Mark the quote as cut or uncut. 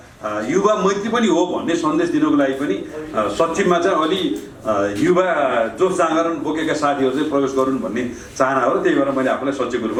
uncut